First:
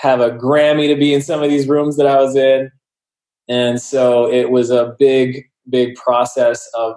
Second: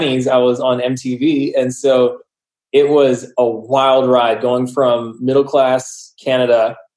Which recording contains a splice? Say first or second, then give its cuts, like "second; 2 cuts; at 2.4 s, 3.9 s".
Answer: second; 1 cut; at 3.3 s